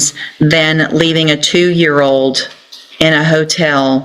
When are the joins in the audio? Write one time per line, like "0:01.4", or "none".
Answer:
0:01.2